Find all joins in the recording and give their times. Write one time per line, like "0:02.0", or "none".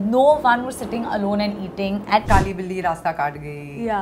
0:02.2